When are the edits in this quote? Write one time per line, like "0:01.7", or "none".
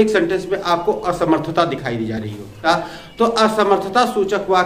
0:02.6